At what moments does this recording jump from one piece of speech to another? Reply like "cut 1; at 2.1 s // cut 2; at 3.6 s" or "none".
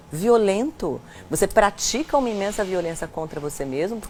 none